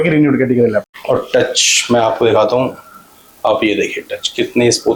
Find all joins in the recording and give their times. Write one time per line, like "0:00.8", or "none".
0:00.9